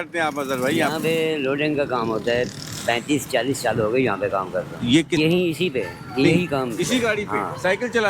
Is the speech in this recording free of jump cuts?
no; 1 cut; at 5.2 s

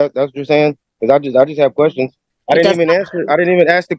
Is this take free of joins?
no; 1 cut; at 2.3 s

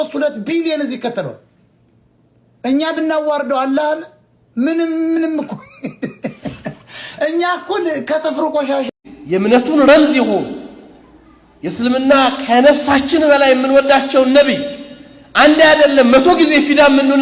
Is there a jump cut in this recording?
yes; 1 cut; at 8.9 s

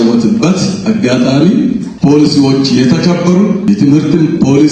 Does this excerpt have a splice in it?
yes; 2 cuts; at 1.9 s, 3.7 s

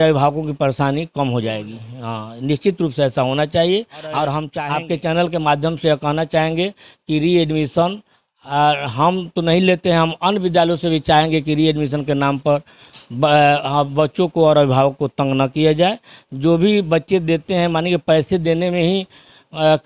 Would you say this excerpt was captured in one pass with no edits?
no; 1 cut; at 4.5 s

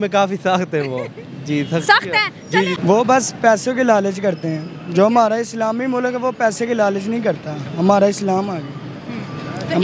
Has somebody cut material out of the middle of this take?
yes; 1 cut; at 2.8 s

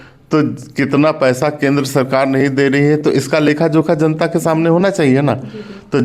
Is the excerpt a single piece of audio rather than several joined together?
yes; 0 cuts

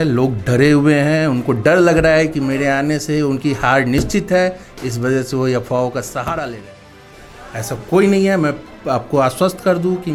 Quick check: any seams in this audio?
no; 0 cuts

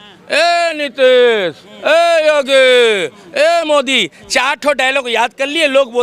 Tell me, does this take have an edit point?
no; 0 cuts

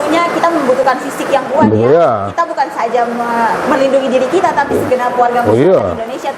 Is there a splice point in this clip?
no; 0 cuts

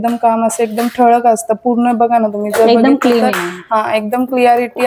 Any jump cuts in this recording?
no; 0 cuts

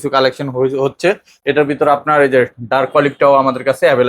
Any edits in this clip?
yes; 1 cut; at 1.3 s

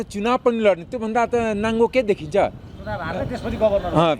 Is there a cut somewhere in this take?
no; 0 cuts

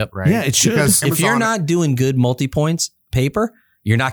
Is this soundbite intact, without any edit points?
no; 1 cut; at 1.0 s

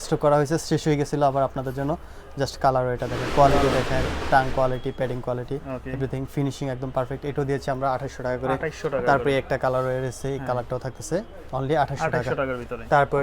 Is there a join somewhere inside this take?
no; 0 cuts

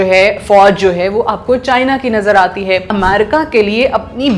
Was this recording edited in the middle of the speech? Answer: yes; 1 cut; at 2.9 s

